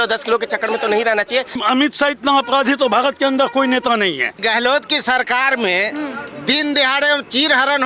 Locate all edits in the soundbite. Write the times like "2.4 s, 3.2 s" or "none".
1.6 s, 4.4 s